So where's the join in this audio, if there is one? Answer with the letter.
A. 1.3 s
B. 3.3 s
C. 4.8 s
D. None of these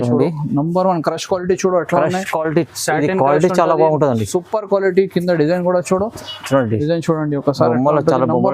D